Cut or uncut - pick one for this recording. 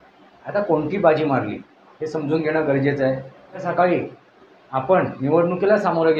cut